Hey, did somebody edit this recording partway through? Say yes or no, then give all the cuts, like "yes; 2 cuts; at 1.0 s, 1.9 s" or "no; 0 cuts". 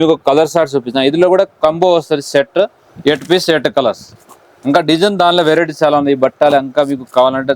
yes; 1 cut; at 2.8 s